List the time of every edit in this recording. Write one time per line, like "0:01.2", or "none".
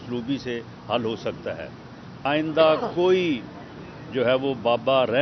0:02.2